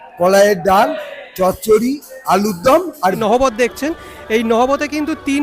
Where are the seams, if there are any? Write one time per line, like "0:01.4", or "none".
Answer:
0:03.2